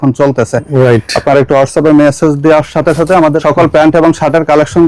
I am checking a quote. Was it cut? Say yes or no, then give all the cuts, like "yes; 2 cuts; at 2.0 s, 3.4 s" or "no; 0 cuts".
yes; 1 cut; at 3.4 s